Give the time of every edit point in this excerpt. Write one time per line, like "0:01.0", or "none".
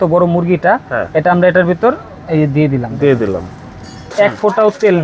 0:04.1